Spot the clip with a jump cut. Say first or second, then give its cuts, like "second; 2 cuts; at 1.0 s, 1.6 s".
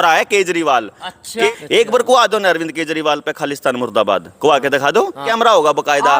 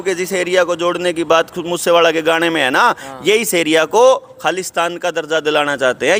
first; 2 cuts; at 1.5 s, 5.2 s